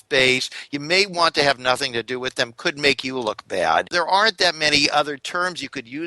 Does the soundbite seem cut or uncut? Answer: cut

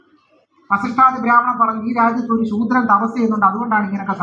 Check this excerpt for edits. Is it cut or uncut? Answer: uncut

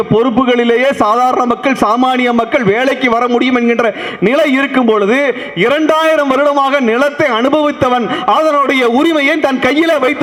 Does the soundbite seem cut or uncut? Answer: uncut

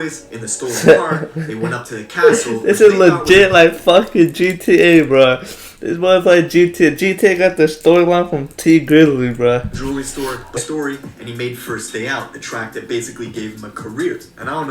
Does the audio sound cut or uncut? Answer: cut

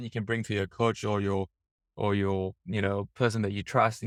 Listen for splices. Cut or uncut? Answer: uncut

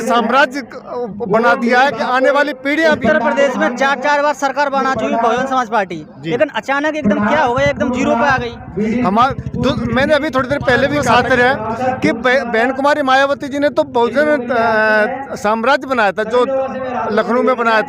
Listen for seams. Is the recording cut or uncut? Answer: cut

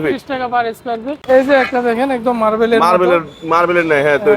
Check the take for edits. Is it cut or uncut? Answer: cut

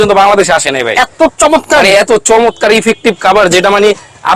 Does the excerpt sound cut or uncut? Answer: uncut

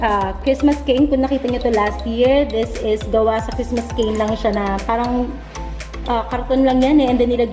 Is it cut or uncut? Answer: uncut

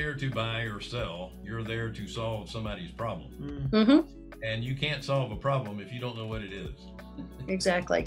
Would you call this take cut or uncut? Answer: cut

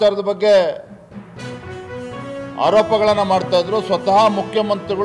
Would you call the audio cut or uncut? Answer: cut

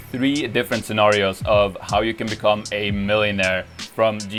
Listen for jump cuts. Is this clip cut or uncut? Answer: uncut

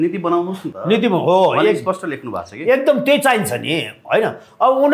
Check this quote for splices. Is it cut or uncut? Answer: uncut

